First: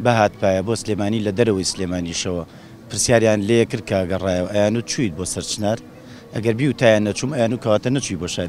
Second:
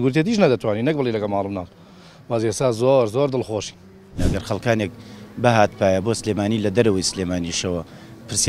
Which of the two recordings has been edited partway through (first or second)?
second